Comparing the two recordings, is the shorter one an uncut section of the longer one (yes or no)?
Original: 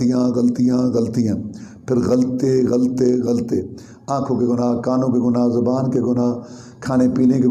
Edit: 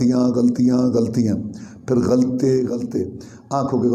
no